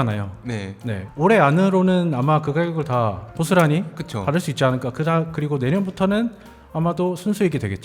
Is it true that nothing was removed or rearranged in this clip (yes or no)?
no